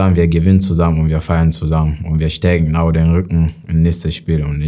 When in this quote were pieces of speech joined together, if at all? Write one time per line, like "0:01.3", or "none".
none

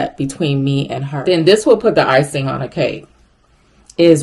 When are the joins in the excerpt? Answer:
0:01.1

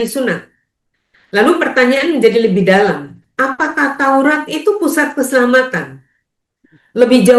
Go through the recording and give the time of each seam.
none

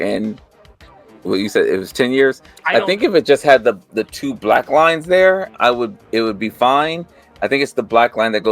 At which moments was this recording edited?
0:02.5

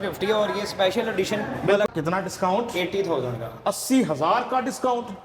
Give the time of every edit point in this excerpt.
0:01.9

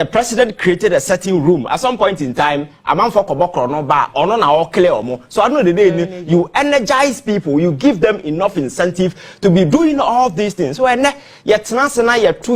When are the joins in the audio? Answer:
none

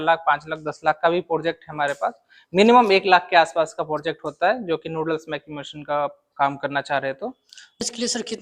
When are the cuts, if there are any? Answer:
none

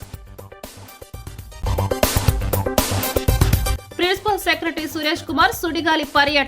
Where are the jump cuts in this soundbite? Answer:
0:01.5
0:03.8

